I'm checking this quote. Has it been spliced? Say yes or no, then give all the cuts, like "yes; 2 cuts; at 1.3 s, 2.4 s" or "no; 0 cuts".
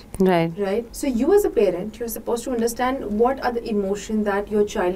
yes; 1 cut; at 0.9 s